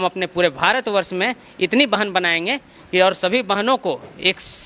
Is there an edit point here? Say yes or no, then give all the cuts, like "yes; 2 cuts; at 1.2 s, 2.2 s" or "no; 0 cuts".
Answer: no; 0 cuts